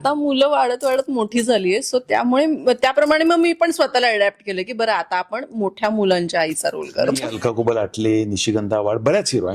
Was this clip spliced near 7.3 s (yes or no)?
yes